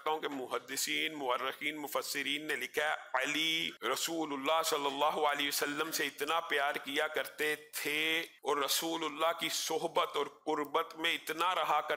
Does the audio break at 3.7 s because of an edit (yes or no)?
yes